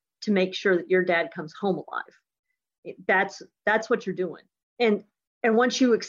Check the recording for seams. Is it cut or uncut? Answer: cut